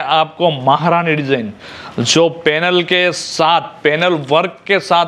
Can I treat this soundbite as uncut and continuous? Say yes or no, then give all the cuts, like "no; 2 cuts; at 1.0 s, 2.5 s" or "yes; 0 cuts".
yes; 0 cuts